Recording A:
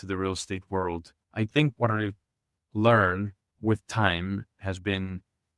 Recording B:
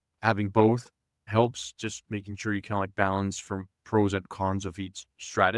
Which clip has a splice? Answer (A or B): A